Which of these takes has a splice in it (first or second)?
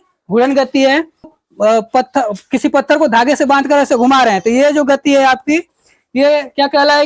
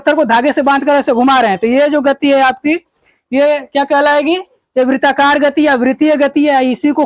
first